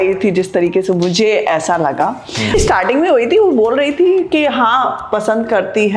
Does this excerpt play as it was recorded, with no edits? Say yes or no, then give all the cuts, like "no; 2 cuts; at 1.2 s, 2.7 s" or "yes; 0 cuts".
no; 1 cut; at 2.5 s